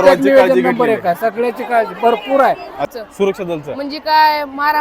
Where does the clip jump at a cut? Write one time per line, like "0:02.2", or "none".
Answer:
0:02.9

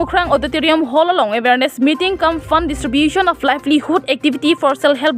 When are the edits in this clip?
none

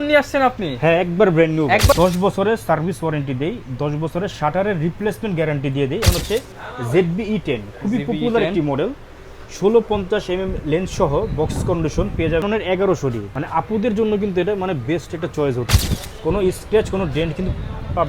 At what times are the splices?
0:01.9
0:06.0
0:12.4
0:13.3
0:15.7

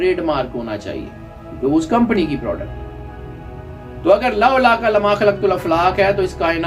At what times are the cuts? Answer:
none

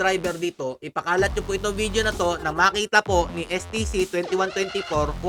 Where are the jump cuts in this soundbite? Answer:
none

